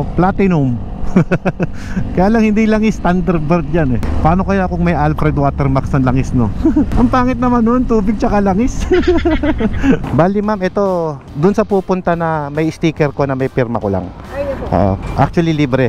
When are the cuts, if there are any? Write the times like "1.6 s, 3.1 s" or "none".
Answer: 4.1 s, 10.0 s